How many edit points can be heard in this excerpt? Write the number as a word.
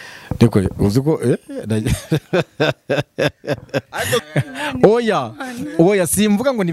one